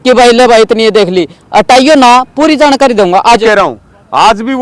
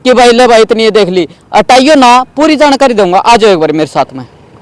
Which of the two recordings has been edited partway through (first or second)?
first